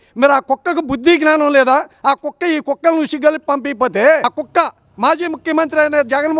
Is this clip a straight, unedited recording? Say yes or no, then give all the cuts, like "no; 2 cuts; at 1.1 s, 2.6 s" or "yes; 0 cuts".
no; 1 cut; at 4.3 s